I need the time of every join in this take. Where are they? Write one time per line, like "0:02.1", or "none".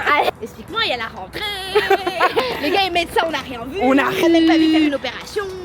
0:02.4
0:04.2